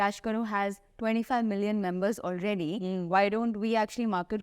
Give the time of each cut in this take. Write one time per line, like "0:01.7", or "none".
none